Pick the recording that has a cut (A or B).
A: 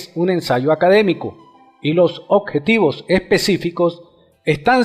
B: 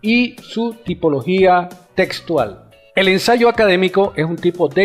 A